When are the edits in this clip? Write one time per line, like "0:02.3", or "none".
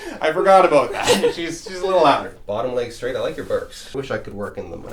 0:02.3
0:03.9